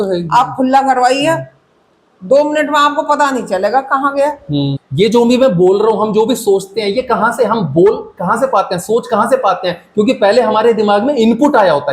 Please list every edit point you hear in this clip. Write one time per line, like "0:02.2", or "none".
0:04.8

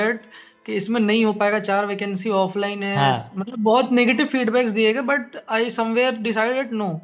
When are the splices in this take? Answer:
none

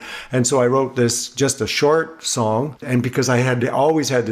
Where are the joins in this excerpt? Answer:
0:02.8

